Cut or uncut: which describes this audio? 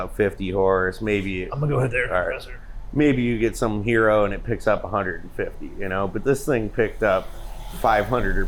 uncut